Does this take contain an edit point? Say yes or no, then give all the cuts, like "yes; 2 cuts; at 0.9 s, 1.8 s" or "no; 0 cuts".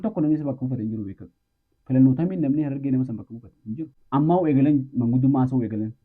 yes; 1 cut; at 3.9 s